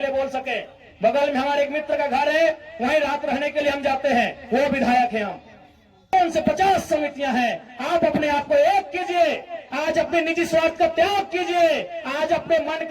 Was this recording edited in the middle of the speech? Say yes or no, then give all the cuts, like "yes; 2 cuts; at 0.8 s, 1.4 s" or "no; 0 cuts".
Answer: yes; 1 cut; at 6.1 s